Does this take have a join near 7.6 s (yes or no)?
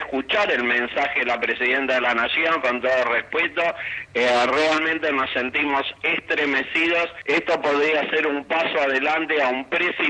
no